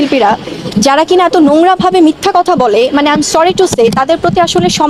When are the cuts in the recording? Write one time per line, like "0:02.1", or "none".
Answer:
none